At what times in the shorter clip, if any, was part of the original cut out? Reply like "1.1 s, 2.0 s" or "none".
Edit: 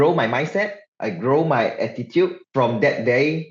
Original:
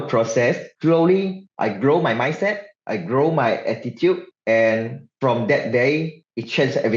2.4 s